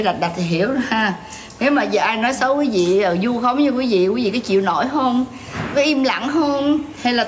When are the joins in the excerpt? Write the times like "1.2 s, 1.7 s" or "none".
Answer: none